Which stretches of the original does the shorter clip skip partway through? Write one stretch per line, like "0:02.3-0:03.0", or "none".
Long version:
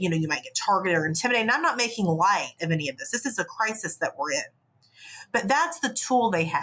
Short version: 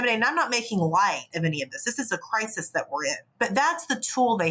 0:04.5-0:05.2